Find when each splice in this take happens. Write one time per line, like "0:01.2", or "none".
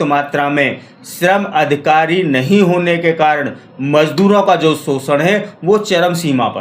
none

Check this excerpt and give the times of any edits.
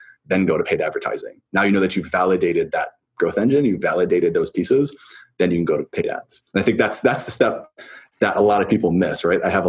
none

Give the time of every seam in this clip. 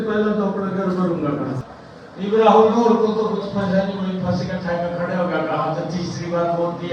0:01.7

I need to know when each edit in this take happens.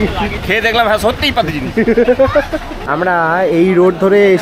0:02.7

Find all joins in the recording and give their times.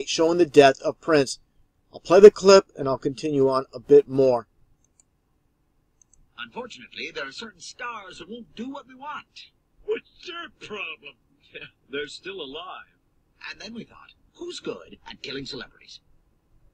none

